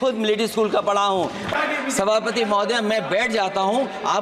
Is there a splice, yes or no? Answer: yes